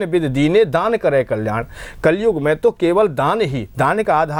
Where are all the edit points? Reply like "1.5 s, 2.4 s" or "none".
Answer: none